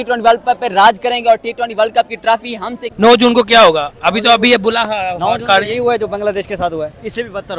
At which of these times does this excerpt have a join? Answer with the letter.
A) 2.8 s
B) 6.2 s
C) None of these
A